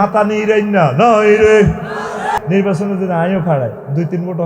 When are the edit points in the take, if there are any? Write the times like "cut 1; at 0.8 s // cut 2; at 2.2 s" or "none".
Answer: cut 1; at 2.4 s